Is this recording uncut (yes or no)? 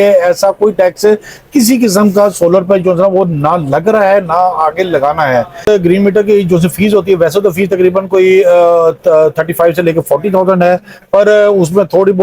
no